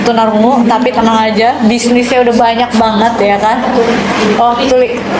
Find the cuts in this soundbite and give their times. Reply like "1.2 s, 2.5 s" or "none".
none